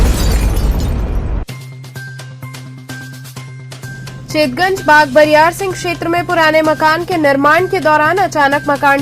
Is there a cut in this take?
no; 0 cuts

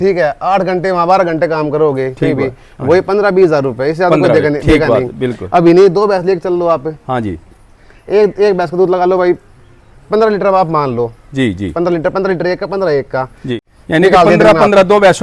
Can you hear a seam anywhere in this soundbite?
no; 0 cuts

